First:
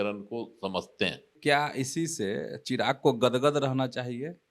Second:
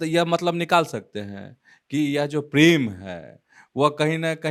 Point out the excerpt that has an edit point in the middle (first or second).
first